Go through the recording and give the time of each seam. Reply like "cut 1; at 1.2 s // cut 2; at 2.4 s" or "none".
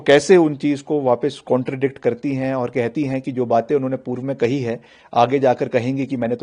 none